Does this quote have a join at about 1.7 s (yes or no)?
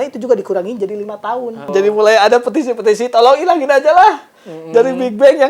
yes